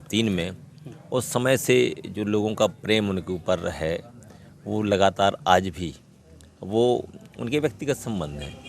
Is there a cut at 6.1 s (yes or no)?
no